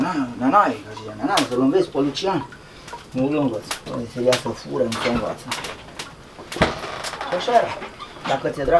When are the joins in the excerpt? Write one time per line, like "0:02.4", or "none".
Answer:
none